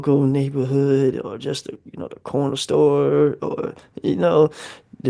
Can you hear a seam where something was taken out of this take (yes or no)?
no